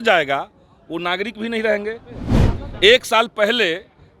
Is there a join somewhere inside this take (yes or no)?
yes